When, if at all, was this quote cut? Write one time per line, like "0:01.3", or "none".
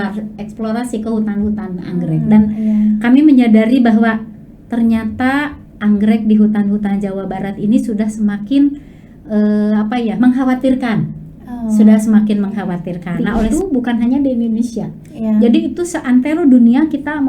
0:13.5